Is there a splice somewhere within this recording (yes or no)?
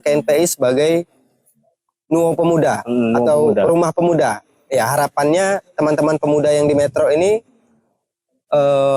no